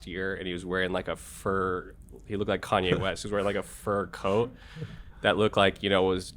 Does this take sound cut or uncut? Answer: uncut